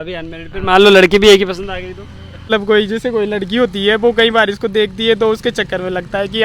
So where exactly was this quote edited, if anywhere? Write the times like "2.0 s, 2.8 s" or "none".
2.5 s